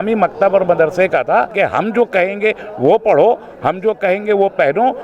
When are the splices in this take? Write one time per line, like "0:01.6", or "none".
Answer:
0:01.5

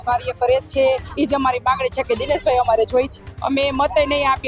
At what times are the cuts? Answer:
0:01.1
0:03.3

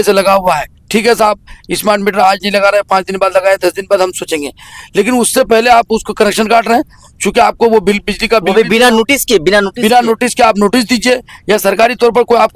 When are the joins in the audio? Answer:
none

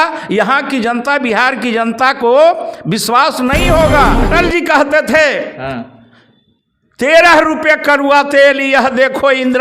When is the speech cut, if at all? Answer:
0:04.2

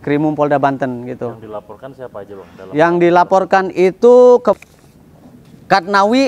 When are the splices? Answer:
0:04.6

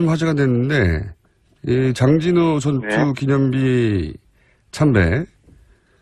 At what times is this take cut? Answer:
0:03.9

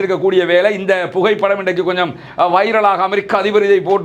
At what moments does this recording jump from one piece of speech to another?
none

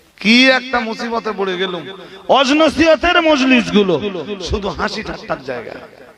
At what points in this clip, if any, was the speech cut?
none

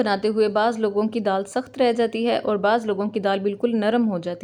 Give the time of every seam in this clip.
none

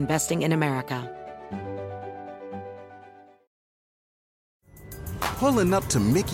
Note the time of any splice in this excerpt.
0:01.0

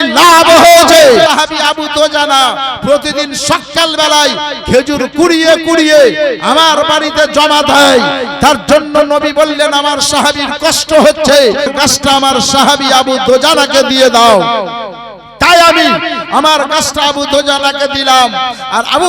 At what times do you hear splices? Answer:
0:01.3
0:11.7

